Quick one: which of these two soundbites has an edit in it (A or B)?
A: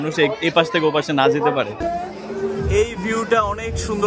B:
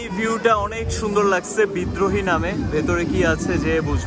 A